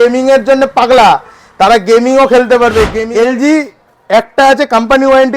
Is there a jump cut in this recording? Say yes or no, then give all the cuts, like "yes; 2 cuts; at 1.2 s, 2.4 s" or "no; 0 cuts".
yes; 1 cut; at 3.0 s